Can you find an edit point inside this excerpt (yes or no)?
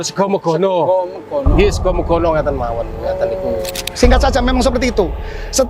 yes